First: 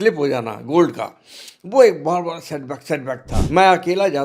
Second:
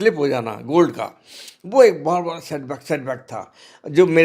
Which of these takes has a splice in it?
first; 1 cut; at 3.3 s

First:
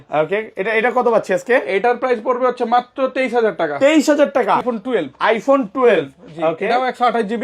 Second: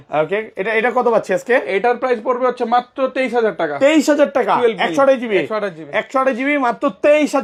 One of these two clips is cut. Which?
first; 1 cut; at 4.6 s

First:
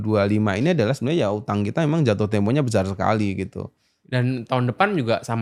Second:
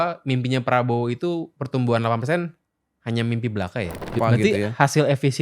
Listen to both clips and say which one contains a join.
second; 1 cut; at 4.1 s

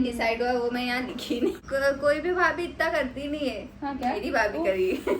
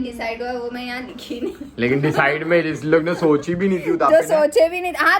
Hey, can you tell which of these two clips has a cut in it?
first; 1 cut; at 1.6 s

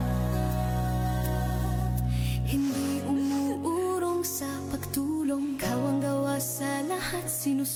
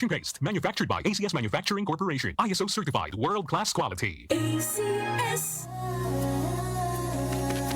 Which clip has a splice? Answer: second; 1 cut; at 5.7 s

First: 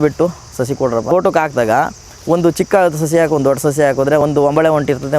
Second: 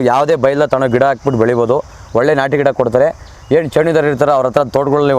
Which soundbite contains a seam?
first; 2 cuts; at 1.1 s, 4.2 s

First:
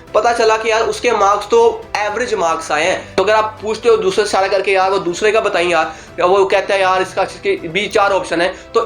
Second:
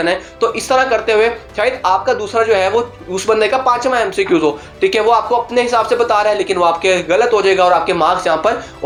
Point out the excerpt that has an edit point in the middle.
first; 1 cut; at 3.1 s

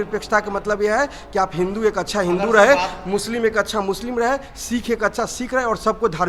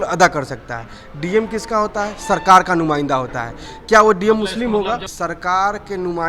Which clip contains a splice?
second; 1 cut; at 5.1 s

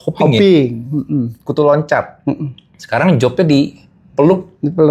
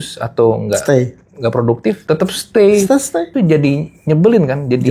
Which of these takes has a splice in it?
second; 2 cuts; at 2.0 s, 3.3 s

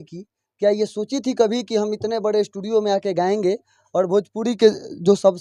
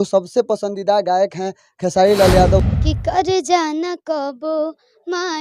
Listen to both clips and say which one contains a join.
second; 1 cut; at 2.6 s

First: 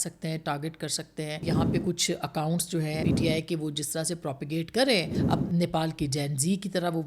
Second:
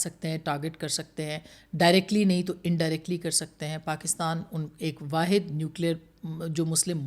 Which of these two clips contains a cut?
first; 3 cuts; at 1.5 s, 3.0 s, 5.2 s

